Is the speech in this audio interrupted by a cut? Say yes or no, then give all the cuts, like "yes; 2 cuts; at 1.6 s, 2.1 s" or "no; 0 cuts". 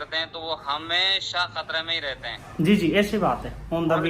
no; 0 cuts